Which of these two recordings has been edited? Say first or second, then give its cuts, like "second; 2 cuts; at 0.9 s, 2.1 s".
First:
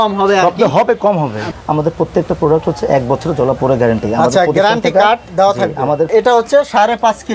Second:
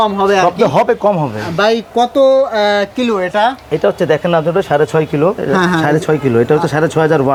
first; 2 cuts; at 1.4 s, 6.1 s